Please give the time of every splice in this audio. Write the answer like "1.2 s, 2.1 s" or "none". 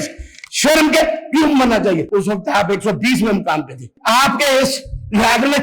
2.1 s, 3.9 s